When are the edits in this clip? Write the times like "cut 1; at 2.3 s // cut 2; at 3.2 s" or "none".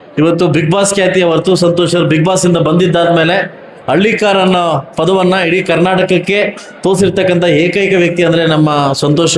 none